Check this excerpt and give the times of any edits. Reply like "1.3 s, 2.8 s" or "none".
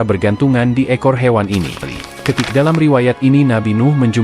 2.4 s